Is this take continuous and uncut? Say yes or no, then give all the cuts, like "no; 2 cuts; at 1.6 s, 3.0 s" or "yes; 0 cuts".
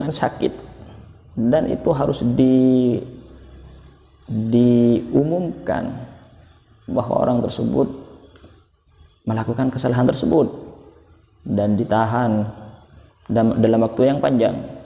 yes; 0 cuts